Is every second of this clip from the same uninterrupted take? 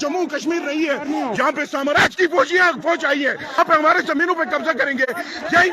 no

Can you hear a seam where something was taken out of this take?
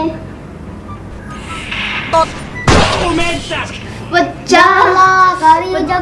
no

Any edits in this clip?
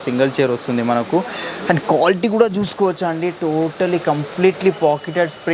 no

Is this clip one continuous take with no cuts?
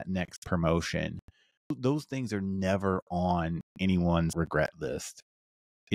no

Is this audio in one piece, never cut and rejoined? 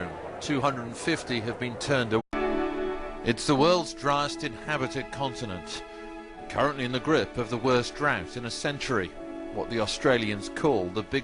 yes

